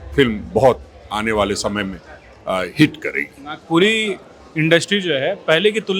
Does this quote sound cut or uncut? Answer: uncut